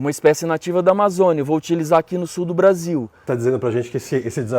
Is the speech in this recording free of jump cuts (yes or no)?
no